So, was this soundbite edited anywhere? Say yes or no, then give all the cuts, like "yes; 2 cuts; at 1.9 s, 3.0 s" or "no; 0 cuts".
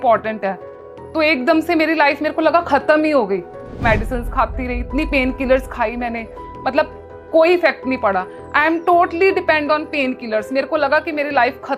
yes; 1 cut; at 3.8 s